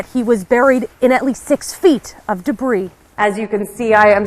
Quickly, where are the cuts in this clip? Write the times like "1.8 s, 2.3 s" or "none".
3.0 s